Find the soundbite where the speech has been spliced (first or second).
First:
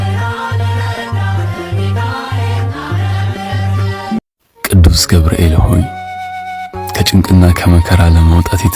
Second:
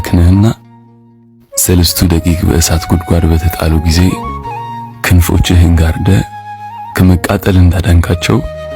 first